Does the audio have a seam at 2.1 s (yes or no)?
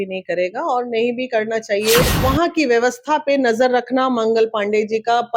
yes